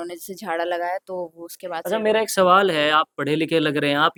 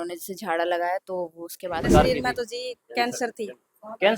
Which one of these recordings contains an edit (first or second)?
second